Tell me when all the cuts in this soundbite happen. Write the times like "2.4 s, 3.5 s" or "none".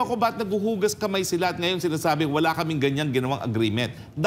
none